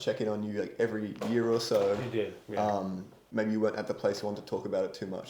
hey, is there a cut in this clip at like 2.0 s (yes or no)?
no